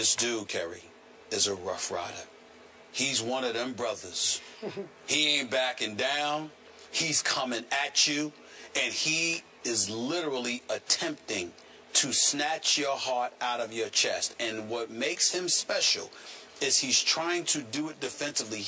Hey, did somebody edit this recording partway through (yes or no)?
yes